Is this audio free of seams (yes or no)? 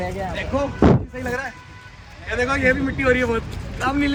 yes